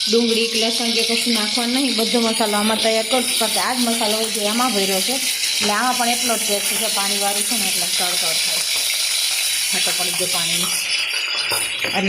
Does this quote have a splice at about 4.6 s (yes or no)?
no